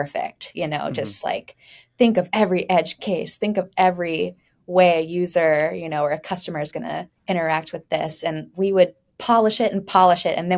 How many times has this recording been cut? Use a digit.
0